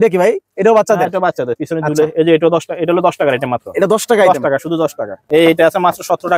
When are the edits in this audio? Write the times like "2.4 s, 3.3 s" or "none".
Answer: 5.2 s

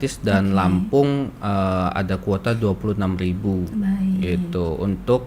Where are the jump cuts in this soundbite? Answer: none

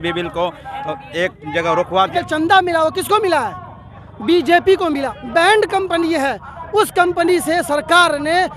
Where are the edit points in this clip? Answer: 2.1 s, 5.1 s

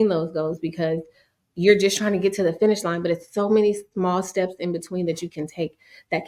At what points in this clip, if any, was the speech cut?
none

